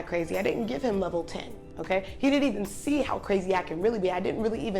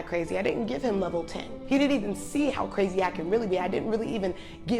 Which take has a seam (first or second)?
second